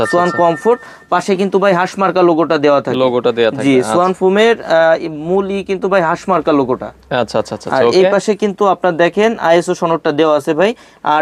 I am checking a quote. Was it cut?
no; 0 cuts

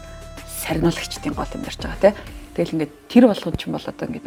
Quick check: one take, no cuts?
yes; 0 cuts

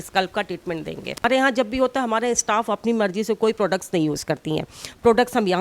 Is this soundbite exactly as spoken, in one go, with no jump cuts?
no; 1 cut; at 1.2 s

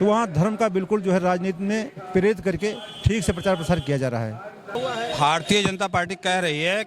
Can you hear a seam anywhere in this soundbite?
yes; 1 cut; at 4.7 s

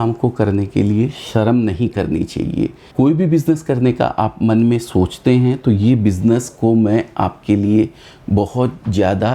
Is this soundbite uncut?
no; 1 cut; at 2.8 s

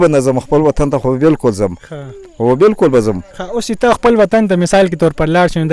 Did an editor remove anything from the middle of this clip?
no; 0 cuts

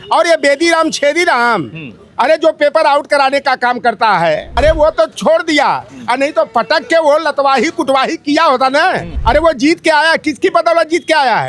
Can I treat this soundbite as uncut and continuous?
no; 2 cuts; at 4.5 s, 9.1 s

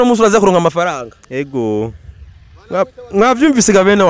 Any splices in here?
no; 0 cuts

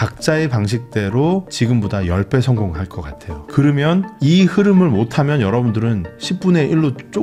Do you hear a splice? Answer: no; 0 cuts

